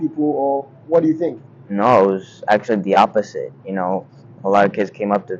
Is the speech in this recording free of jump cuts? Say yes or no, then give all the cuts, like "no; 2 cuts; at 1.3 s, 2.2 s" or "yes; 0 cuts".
yes; 0 cuts